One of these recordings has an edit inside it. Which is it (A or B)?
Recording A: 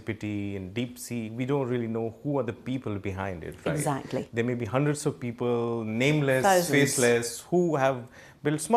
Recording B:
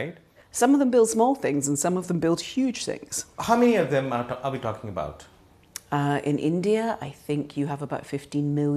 B